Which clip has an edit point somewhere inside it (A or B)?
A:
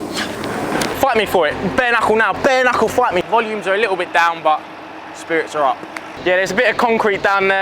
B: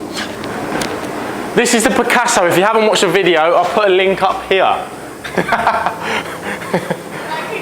A